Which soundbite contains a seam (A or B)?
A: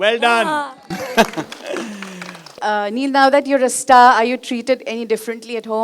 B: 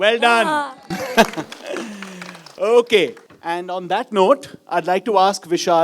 A